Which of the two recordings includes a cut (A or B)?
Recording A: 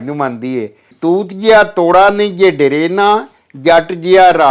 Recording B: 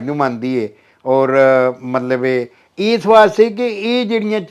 A